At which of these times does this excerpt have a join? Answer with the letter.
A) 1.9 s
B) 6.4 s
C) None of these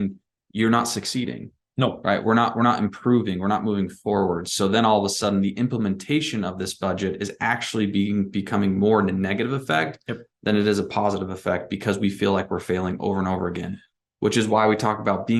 C